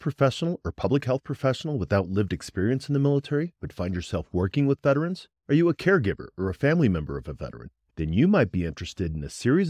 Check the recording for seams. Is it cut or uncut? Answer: uncut